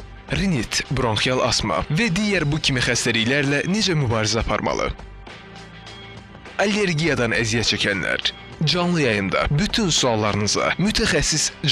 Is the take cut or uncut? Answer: uncut